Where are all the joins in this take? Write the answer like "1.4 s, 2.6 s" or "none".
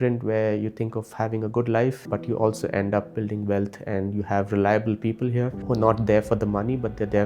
2.0 s, 5.6 s

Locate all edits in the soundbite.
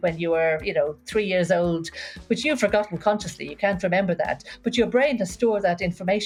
none

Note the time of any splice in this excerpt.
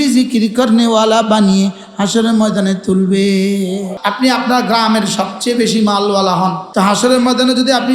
3.9 s, 6.6 s

